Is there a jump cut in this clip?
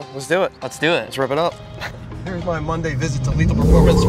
yes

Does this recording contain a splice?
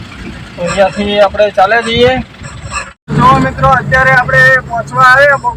yes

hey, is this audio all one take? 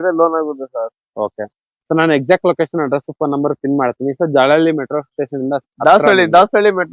yes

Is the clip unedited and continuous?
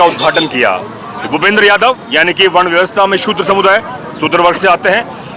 yes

